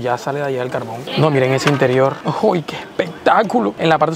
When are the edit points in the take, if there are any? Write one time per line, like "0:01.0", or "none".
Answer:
0:01.0